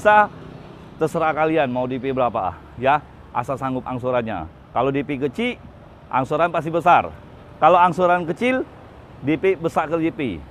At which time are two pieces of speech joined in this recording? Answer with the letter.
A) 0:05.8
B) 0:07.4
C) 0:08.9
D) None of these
D